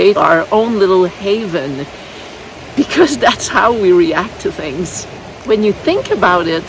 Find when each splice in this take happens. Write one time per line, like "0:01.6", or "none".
0:05.4